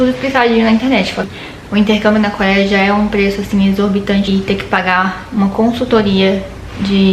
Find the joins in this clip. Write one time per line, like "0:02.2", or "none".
0:01.2
0:04.3